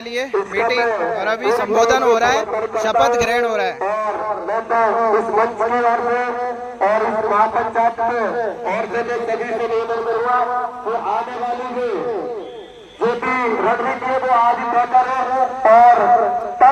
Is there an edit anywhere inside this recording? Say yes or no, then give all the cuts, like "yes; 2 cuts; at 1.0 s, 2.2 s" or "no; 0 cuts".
no; 0 cuts